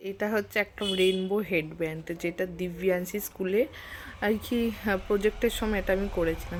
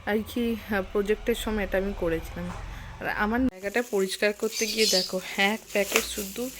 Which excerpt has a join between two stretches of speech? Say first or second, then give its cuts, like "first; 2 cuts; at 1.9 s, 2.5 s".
second; 1 cut; at 3.5 s